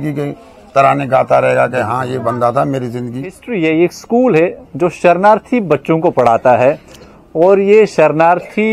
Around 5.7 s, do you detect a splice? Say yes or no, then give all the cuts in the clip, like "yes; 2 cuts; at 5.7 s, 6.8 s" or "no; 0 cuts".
no; 1 cut; at 3.4 s